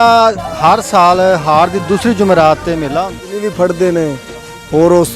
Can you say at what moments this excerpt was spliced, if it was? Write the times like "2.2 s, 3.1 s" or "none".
3.2 s